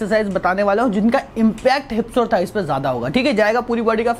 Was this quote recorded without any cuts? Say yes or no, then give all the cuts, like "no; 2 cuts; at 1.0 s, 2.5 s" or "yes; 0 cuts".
yes; 0 cuts